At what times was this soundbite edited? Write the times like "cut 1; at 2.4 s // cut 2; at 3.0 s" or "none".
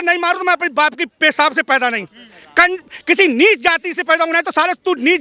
none